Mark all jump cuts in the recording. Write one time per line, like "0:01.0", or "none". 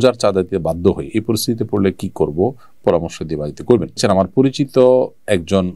0:04.0